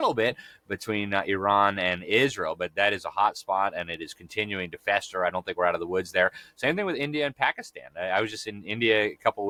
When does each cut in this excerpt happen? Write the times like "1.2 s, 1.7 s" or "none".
none